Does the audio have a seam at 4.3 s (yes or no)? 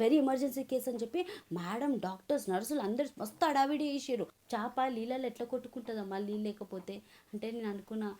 yes